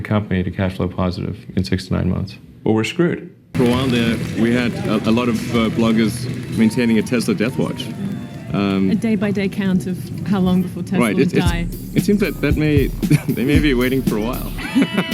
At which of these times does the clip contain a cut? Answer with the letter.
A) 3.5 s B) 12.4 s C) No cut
A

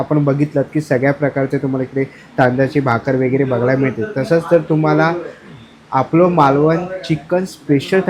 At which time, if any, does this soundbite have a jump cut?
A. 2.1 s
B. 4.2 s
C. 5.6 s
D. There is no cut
D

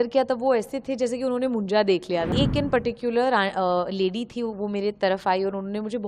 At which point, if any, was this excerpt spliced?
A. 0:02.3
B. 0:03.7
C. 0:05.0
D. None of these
A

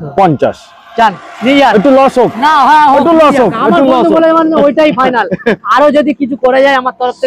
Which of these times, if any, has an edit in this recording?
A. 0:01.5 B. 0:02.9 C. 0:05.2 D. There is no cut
D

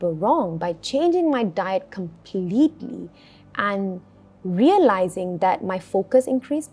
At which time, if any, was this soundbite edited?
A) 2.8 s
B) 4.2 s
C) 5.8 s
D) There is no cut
D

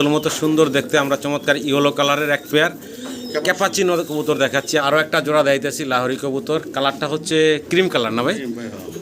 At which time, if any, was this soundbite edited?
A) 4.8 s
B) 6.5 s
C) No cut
A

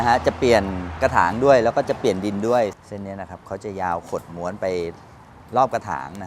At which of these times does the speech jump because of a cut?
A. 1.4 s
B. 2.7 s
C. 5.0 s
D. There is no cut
B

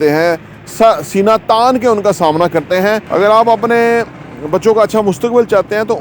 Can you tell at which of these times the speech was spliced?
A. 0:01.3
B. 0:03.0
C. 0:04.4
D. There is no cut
B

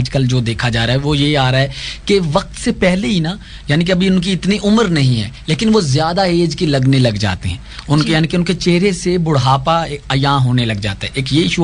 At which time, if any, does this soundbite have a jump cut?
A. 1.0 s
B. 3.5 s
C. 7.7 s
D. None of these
D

